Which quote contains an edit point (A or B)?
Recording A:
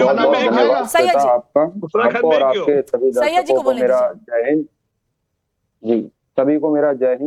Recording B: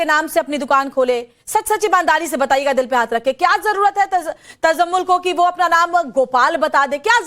B